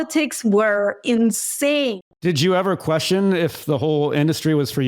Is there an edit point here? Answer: yes; 1 cut; at 2.1 s

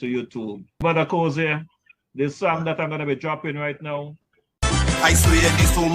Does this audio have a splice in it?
yes; 2 cuts; at 0.8 s, 4.6 s

